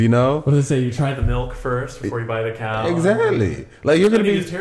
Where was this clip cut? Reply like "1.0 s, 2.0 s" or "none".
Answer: none